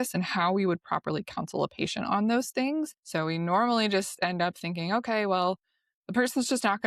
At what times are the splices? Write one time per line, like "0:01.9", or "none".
0:03.0